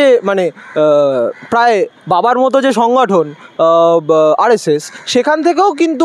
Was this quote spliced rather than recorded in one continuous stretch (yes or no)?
no